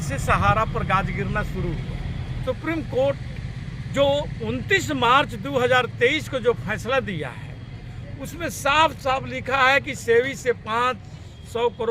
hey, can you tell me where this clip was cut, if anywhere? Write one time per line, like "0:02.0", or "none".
0:02.4